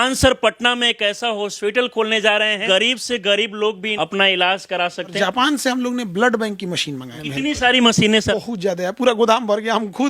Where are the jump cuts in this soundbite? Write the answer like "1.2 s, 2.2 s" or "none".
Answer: 2.6 s, 3.9 s, 5.1 s, 7.1 s, 8.3 s